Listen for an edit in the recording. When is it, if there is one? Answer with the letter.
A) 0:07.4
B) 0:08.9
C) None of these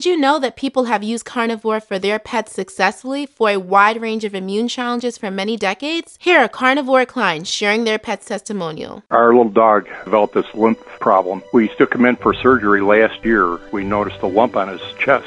B